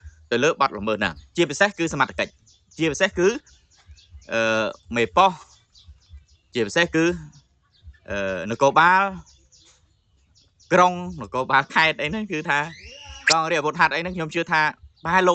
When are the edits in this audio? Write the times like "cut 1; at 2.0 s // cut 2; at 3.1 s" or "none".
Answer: cut 1; at 1.2 s